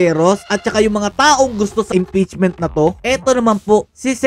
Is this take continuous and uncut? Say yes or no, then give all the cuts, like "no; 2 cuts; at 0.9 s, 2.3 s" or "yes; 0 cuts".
no; 1 cut; at 3.0 s